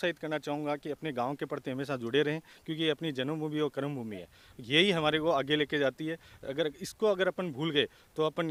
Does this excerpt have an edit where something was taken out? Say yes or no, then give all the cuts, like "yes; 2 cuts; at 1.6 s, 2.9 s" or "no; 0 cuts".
no; 0 cuts